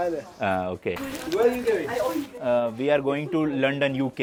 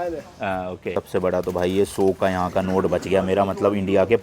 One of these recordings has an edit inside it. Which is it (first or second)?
second